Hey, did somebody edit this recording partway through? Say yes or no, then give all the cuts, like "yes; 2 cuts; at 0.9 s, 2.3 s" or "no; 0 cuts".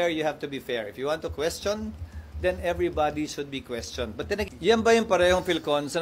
yes; 1 cut; at 4.5 s